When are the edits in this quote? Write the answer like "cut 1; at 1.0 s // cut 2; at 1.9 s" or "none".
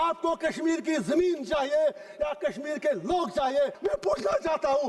cut 1; at 3.8 s